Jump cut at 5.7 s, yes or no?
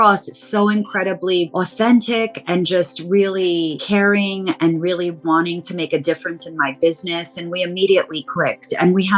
no